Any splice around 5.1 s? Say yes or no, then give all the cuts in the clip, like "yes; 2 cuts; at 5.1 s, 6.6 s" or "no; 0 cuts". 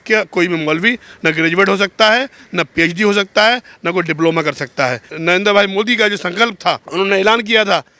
yes; 2 cuts; at 5.1 s, 6.8 s